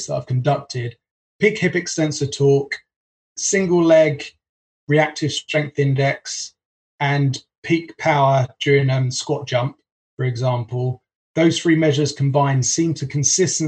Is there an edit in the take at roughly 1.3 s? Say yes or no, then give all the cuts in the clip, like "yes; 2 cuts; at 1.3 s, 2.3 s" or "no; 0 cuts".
no; 1 cut; at 3.2 s